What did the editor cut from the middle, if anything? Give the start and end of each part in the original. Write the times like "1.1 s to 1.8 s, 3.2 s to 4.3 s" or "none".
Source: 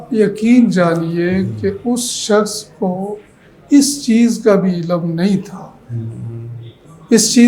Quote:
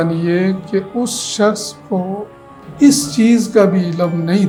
none